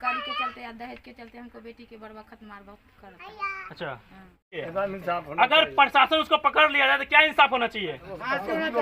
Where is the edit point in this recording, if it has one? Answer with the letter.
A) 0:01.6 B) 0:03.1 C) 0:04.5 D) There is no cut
C